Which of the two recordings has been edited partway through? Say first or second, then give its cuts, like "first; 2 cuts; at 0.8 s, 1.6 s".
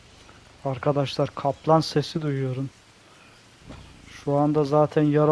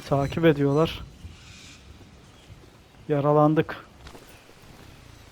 second; 1 cut; at 4.1 s